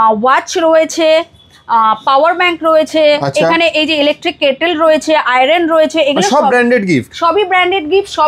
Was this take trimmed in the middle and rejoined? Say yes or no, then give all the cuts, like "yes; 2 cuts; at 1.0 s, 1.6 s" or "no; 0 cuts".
no; 0 cuts